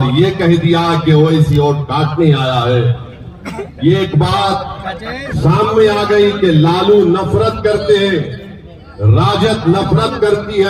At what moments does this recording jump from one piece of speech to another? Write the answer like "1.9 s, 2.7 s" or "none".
none